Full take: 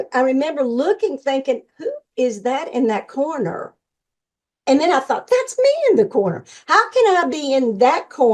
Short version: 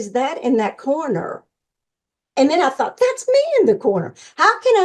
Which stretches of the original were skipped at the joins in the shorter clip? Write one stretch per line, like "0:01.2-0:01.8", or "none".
none